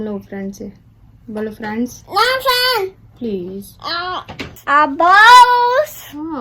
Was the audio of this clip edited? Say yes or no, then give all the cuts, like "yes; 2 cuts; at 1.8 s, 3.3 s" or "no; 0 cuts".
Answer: yes; 1 cut; at 4.6 s